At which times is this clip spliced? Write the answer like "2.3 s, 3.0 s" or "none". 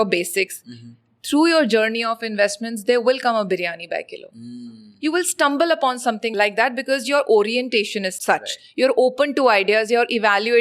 6.3 s, 8.1 s